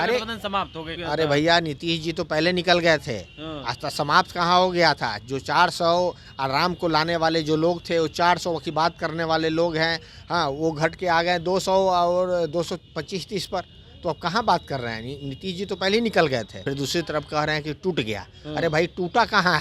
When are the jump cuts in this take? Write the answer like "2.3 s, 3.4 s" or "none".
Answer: 0.9 s, 16.6 s